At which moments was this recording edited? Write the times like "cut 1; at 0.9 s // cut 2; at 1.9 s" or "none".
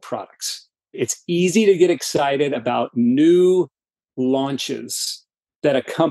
cut 1; at 1.0 s